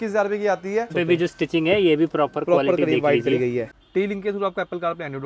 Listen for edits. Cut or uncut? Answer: cut